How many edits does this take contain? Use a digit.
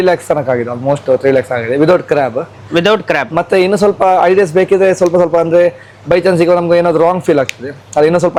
0